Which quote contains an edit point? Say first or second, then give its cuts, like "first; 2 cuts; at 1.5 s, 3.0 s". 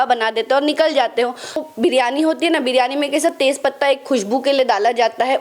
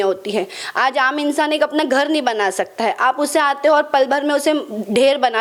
first; 1 cut; at 1.6 s